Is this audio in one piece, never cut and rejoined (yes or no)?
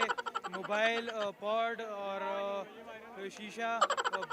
yes